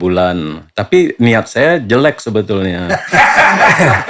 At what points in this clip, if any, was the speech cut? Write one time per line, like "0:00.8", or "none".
none